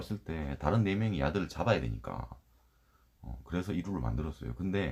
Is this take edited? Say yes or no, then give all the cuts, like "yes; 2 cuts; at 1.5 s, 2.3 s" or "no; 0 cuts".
no; 0 cuts